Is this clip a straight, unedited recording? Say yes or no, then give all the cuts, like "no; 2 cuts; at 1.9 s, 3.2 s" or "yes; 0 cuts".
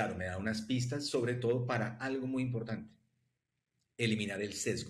yes; 0 cuts